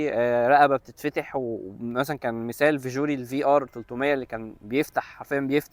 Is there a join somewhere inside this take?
no; 0 cuts

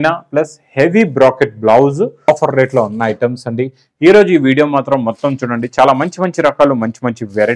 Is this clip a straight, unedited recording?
no; 1 cut; at 2.3 s

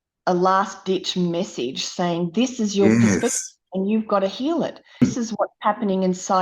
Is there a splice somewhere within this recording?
yes; 1 cut; at 5.0 s

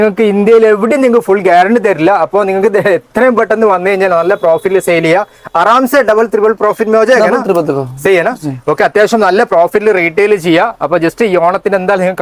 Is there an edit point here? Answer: no; 0 cuts

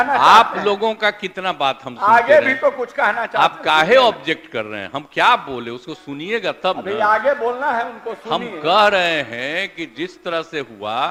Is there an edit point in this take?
no; 0 cuts

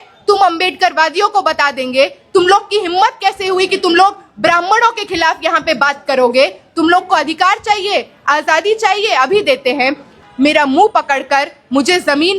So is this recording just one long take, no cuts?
no; 1 cut; at 10.2 s

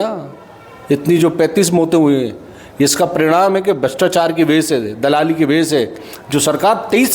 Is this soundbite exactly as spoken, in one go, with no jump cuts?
yes; 0 cuts

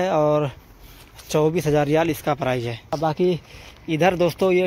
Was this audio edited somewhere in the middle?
yes; 1 cut; at 3.0 s

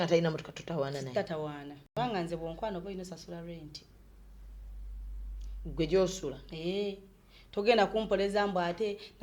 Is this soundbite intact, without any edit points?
no; 1 cut; at 1.9 s

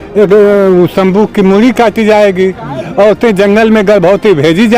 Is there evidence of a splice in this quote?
no; 0 cuts

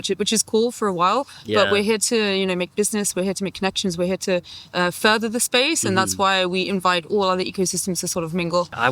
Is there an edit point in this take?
no; 0 cuts

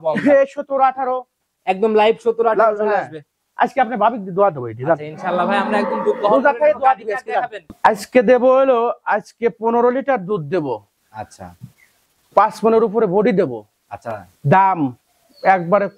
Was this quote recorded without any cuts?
no; 1 cut; at 7.7 s

